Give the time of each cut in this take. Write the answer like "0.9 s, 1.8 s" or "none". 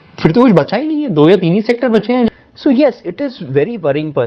2.3 s